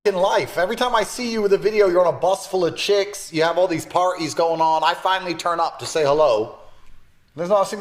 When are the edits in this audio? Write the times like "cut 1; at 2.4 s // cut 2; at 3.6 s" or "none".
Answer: none